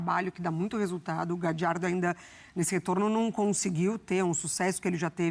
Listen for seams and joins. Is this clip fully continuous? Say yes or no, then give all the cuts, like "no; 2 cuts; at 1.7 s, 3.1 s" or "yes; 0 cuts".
yes; 0 cuts